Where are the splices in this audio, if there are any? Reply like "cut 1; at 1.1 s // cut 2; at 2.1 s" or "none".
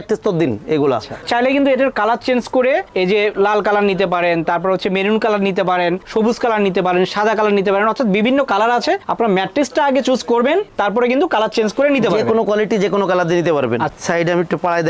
cut 1; at 1.2 s // cut 2; at 10.7 s // cut 3; at 13.9 s